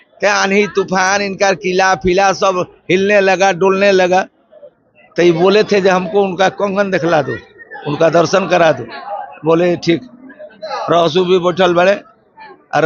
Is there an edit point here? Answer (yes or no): no